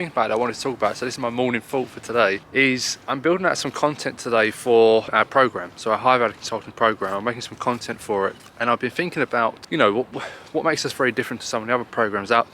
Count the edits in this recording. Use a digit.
4